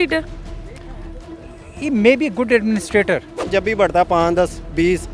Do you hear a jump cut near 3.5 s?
yes; 1 cut; at 3.5 s

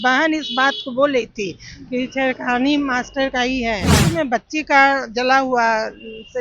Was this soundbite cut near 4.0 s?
yes; 1 cut; at 4.0 s

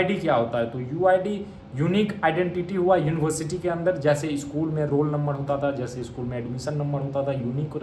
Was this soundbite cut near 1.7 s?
no; 0 cuts

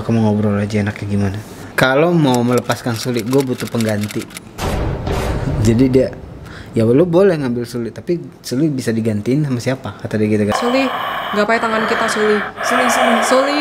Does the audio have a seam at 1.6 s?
yes; 2 cuts; at 1.6 s, 10.5 s

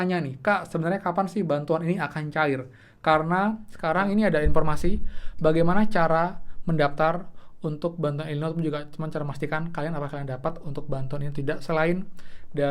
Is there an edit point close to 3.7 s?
yes; 1 cut; at 3.7 s

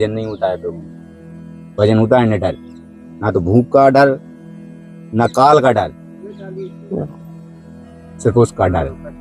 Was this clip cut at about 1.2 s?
no; 0 cuts

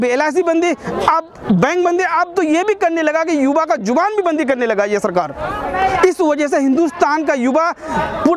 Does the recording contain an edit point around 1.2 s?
no; 0 cuts

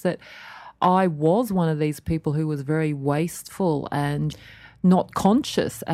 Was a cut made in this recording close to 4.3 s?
yes; 1 cut; at 4.3 s

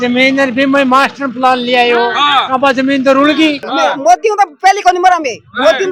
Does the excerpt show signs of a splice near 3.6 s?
yes; 1 cut; at 3.6 s

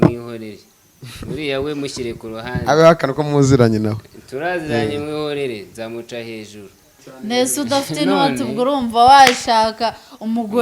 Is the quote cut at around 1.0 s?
no; 1 cut; at 7.0 s

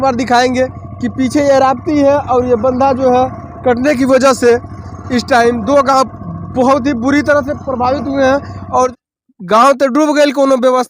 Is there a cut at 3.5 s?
no; 1 cut; at 8.9 s

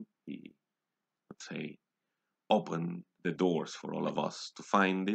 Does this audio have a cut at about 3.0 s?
yes; 1 cut; at 3.0 s

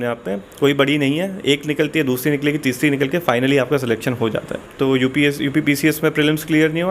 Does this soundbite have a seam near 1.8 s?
no; 1 cut; at 4.6 s

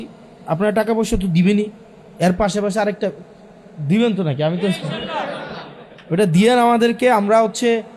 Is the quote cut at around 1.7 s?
no; 0 cuts

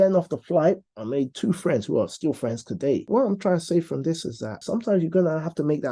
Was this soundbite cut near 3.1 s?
yes; 2 cuts; at 3.1 s, 4.5 s

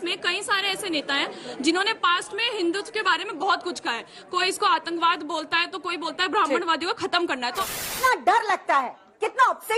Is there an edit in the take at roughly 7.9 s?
yes; 1 cut; at 7.9 s

